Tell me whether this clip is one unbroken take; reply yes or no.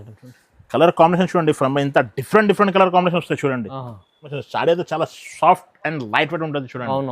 no